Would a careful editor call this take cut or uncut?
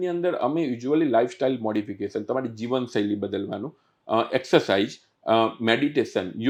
uncut